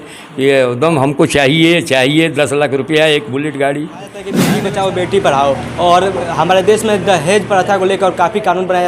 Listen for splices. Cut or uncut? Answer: cut